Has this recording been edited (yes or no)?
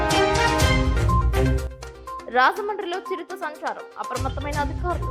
yes